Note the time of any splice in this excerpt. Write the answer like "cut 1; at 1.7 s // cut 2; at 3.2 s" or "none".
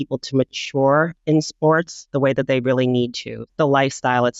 cut 1; at 2.0 s // cut 2; at 3.4 s